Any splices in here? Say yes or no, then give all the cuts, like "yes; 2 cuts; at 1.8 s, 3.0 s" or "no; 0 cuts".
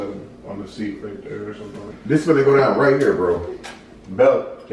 yes; 1 cut; at 1.9 s